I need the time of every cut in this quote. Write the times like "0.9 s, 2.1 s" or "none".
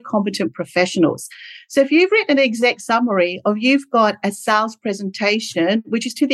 none

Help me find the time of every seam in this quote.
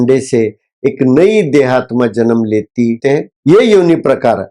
3.1 s

